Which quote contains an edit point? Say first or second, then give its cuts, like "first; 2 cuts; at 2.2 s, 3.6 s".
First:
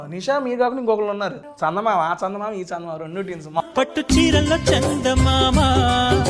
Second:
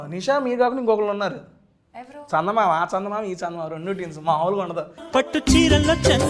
first; 2 cuts; at 1.4 s, 3.6 s